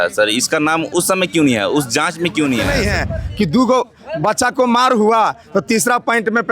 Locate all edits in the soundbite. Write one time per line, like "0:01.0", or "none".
0:02.7